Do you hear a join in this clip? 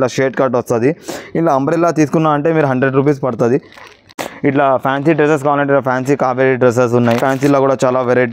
yes; 2 cuts; at 4.2 s, 7.2 s

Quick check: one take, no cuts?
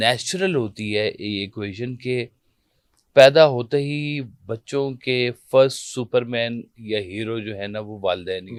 yes; 0 cuts

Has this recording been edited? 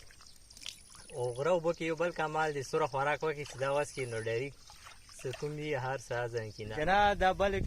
yes; 1 cut; at 6.8 s

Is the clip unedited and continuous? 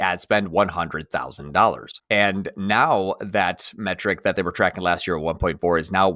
no; 1 cut; at 1.9 s

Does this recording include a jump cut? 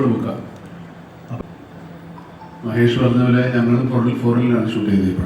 yes; 1 cut; at 1.4 s

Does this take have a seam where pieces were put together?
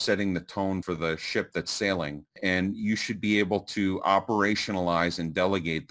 yes; 2 cuts; at 0.8 s, 2.4 s

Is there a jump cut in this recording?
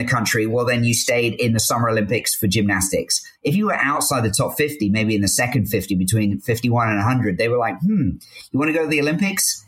no; 0 cuts

